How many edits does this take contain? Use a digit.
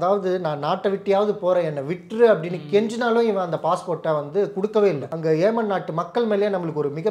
1